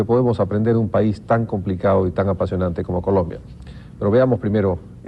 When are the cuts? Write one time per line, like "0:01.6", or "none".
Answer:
0:01.2